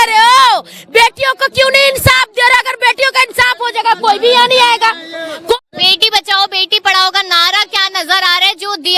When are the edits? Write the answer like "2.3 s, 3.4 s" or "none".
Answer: 5.5 s